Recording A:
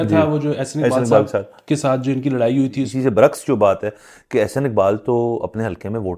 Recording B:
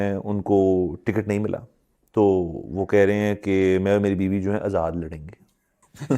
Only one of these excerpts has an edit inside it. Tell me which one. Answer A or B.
A